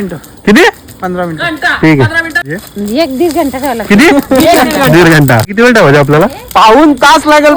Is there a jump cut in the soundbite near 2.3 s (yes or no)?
no